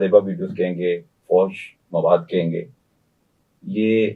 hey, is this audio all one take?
yes; 0 cuts

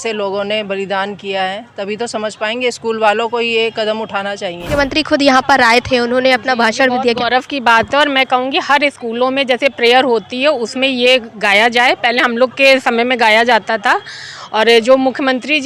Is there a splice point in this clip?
yes; 1 cut; at 4.7 s

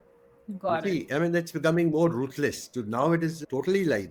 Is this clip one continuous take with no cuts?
yes; 0 cuts

